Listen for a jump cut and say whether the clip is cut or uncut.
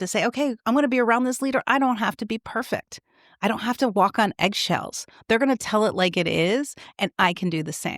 uncut